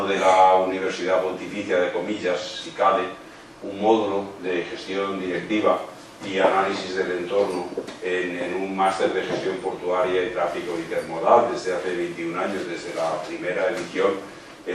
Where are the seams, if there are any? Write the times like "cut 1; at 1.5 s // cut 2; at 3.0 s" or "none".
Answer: cut 1; at 3.1 s